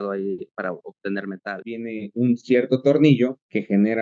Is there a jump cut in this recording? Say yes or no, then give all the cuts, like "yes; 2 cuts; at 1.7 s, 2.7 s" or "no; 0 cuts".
yes; 1 cut; at 1.7 s